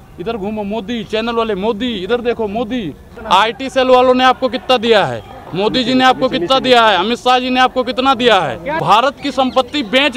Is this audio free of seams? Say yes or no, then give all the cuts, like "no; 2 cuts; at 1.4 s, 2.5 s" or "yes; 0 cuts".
no; 2 cuts; at 3.1 s, 8.8 s